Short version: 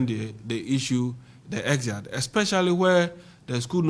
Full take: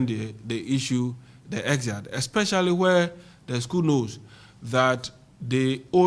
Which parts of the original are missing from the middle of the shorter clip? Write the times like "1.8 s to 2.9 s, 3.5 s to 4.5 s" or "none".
none